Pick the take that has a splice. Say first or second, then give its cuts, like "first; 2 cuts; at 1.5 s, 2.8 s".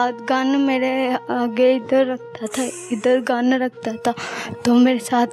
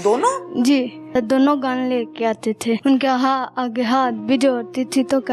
second; 2 cuts; at 1.2 s, 2.8 s